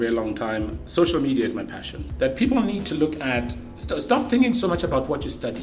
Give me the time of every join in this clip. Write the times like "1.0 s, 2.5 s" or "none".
2.0 s